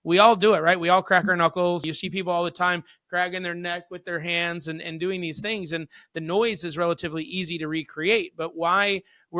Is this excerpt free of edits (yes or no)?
no